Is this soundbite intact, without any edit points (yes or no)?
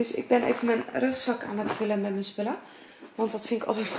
yes